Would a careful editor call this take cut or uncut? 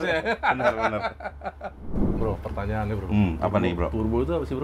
cut